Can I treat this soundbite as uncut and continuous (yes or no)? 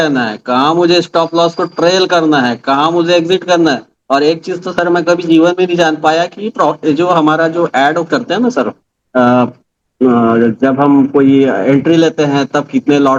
yes